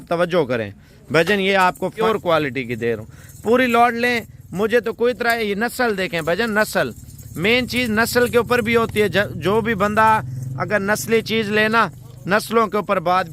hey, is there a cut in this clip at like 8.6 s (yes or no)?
no